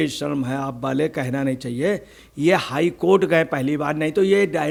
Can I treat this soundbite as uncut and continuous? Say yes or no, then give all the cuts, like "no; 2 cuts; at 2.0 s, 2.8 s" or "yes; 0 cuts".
yes; 0 cuts